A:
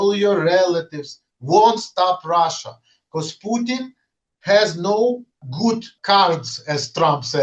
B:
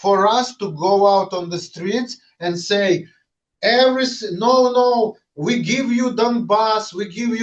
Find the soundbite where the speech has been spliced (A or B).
A